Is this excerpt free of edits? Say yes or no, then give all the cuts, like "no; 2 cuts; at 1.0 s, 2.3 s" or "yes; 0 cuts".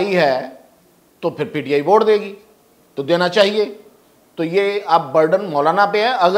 yes; 0 cuts